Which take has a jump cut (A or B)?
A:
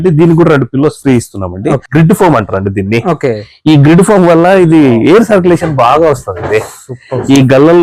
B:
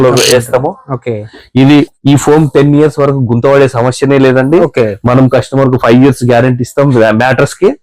A